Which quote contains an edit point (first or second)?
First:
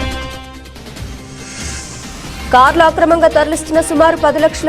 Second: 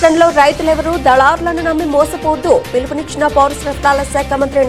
first